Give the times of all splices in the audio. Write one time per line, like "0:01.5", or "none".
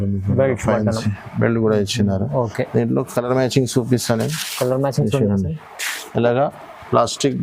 none